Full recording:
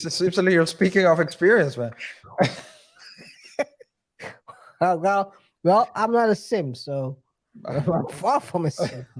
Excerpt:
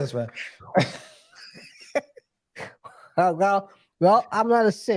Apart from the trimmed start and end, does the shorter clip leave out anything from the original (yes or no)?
no